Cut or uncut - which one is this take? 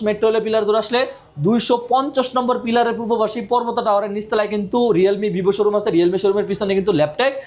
uncut